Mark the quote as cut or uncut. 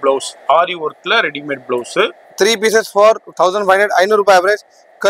cut